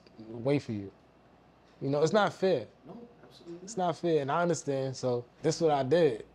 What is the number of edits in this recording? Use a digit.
1